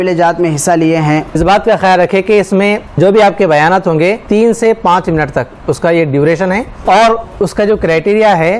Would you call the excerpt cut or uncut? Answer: cut